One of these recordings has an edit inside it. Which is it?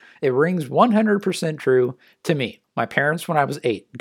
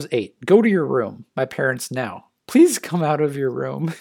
first; 1 cut; at 2.6 s

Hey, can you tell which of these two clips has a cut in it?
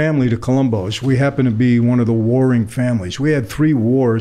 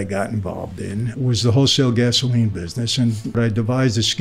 second; 2 cuts; at 1.1 s, 3.4 s

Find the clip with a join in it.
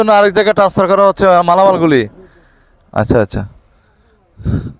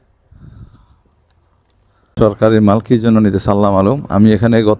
second; 1 cut; at 2.1 s

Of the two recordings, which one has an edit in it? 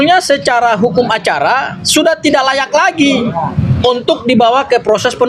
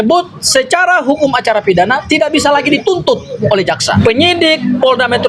second; 1 cut; at 4.0 s

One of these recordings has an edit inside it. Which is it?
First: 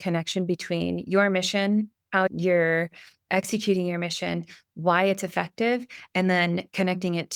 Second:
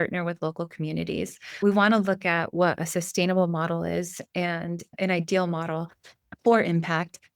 second; 1 cut; at 1.6 s

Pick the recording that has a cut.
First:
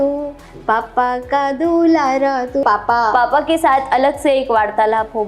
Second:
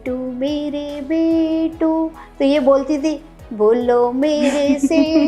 first; 1 cut; at 2.6 s

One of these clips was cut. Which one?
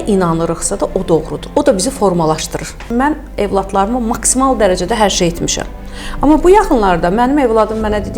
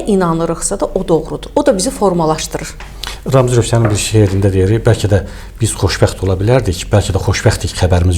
first; 1 cut; at 2.8 s

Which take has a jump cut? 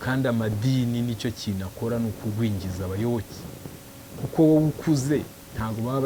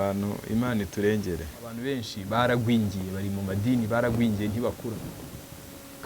second; 1 cut; at 1.8 s

